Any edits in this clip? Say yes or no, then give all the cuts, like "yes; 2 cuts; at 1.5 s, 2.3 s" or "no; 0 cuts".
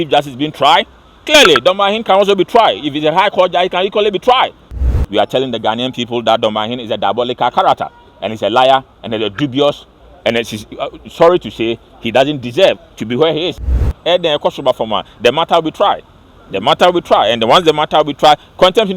yes; 2 cuts; at 4.8 s, 13.7 s